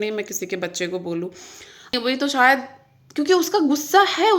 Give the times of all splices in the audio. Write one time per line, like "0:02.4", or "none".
0:01.9